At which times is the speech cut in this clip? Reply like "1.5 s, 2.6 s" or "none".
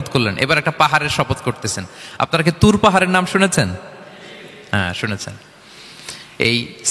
none